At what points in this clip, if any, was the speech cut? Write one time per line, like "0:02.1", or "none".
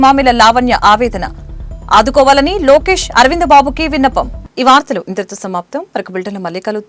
none